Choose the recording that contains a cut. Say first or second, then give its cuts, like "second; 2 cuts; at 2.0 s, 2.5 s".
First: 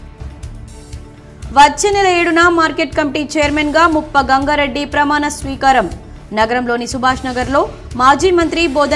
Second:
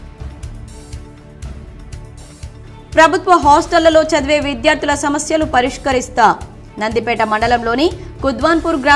second; 1 cut; at 1.0 s